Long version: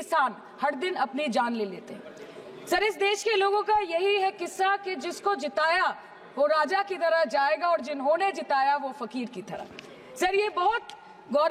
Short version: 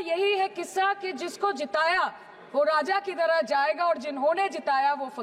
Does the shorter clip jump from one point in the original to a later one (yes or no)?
no